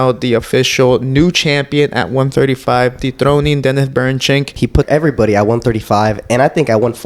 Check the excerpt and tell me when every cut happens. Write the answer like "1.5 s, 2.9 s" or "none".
4.8 s